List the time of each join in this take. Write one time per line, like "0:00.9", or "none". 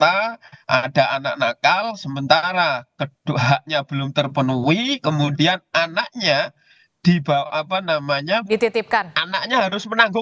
none